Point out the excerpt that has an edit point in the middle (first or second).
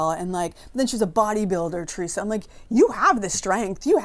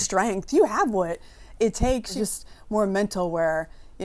second